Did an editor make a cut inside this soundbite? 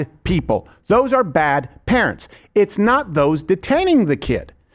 no; 0 cuts

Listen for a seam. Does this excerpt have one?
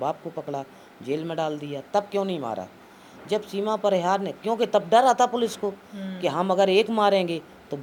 no; 0 cuts

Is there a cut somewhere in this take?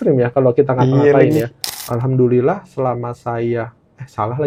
yes; 1 cut; at 1.6 s

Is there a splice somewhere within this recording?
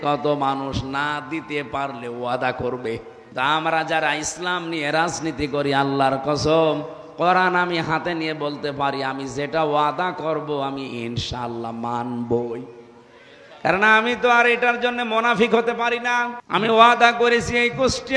yes; 2 cuts; at 3.2 s, 16.4 s

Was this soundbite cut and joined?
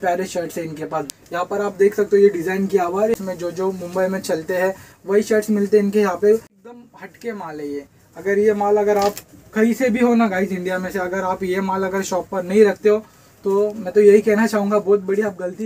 yes; 3 cuts; at 1.1 s, 3.1 s, 6.6 s

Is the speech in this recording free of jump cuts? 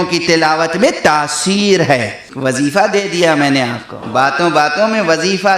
no; 2 cuts; at 2.2 s, 4.0 s

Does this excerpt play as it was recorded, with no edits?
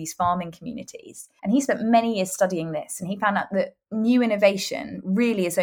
yes; 0 cuts

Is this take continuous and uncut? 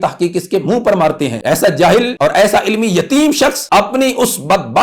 no; 3 cuts; at 1.4 s, 2.1 s, 3.6 s

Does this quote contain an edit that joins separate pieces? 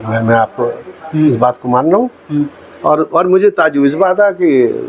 no; 0 cuts

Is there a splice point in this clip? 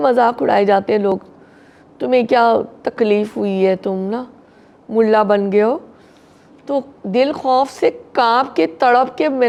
no; 0 cuts

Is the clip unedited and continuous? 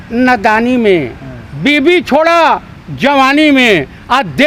yes; 0 cuts

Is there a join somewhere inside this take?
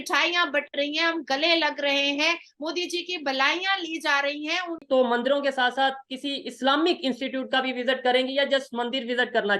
yes; 1 cut; at 4.8 s

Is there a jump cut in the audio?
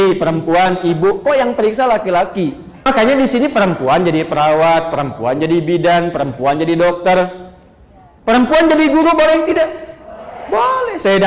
yes; 1 cut; at 2.7 s

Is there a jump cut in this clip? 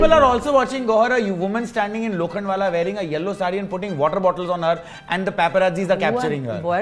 no; 0 cuts

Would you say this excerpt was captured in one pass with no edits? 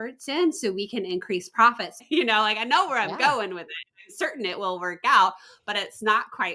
no; 1 cut; at 1.9 s

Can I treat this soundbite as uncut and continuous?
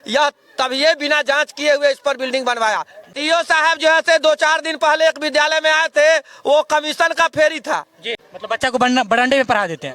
no; 2 cuts; at 3.1 s, 8.2 s

